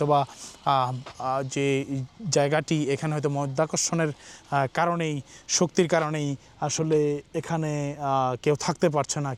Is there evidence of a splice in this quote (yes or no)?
no